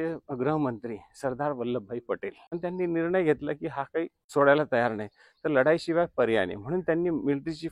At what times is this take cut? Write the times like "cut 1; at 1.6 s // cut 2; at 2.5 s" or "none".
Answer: cut 1; at 2.5 s // cut 2; at 4.2 s